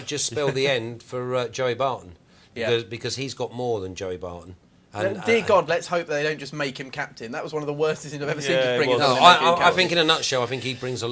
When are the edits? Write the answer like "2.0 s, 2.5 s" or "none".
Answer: 6.8 s